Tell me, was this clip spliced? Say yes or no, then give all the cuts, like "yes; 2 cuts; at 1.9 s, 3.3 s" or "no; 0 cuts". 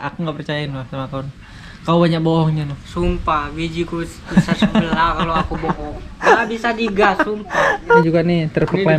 yes; 1 cut; at 8.0 s